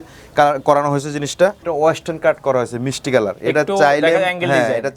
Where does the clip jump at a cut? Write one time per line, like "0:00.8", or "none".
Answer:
0:01.6